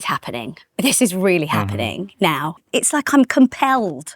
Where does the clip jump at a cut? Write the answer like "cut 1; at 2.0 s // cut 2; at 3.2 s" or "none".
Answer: cut 1; at 2.5 s